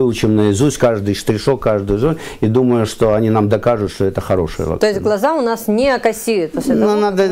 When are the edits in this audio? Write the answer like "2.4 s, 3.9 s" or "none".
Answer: none